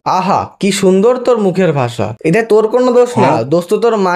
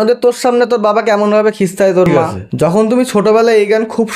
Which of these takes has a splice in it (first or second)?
second